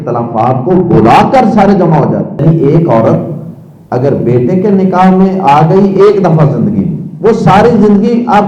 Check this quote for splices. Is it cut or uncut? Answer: cut